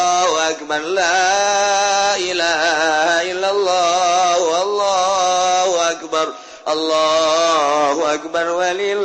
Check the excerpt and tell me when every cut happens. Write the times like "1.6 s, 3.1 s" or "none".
none